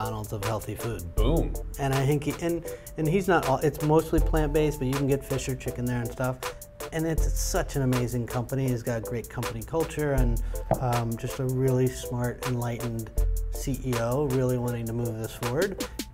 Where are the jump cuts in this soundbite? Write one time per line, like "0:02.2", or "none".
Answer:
none